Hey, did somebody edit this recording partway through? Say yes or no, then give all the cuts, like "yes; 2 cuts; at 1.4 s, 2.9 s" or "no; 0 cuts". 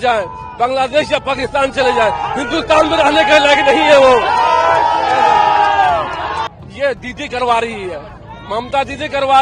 yes; 1 cut; at 6.5 s